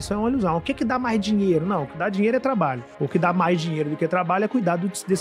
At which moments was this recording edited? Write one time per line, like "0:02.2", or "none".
none